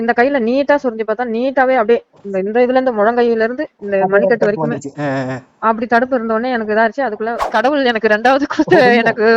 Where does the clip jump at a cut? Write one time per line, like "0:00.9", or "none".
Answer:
0:07.5